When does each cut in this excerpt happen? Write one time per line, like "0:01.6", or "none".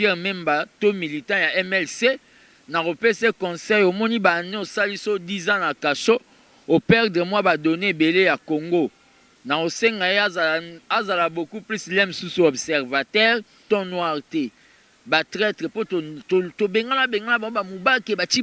0:13.6